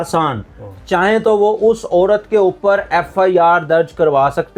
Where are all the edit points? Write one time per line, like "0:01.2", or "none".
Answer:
none

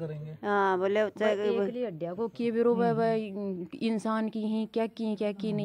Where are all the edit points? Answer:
none

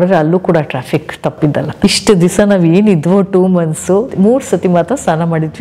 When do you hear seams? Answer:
0:01.7
0:04.1

